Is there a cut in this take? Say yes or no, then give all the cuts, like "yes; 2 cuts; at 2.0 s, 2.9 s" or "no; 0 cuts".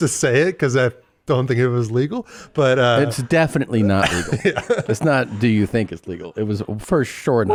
no; 0 cuts